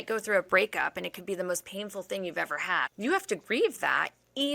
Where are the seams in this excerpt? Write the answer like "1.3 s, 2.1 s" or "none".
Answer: 2.9 s